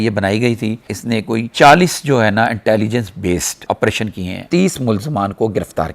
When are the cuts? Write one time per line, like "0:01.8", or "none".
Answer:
0:00.9
0:04.5